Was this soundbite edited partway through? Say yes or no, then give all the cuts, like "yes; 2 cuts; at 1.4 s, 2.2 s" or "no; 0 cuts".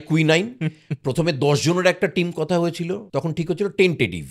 yes; 1 cut; at 3.0 s